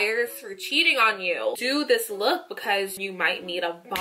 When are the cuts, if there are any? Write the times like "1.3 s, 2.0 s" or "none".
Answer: 1.6 s, 3.0 s